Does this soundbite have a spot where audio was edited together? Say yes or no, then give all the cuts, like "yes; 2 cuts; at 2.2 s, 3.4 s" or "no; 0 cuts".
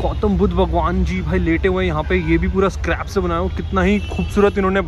no; 0 cuts